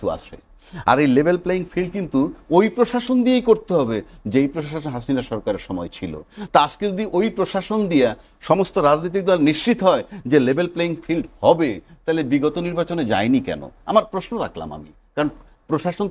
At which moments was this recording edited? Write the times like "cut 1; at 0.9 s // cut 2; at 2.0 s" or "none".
none